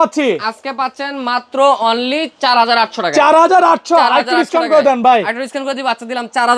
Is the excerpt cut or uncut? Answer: uncut